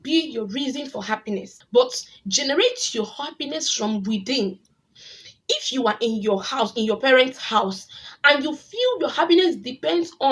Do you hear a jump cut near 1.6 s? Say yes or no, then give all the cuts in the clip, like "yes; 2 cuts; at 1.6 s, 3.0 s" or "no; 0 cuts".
yes; 1 cut; at 1.6 s